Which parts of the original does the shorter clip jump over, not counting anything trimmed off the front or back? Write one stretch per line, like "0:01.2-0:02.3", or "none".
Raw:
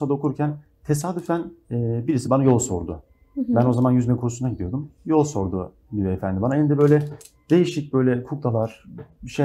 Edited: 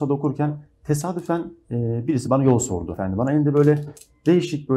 0:03.0-0:06.2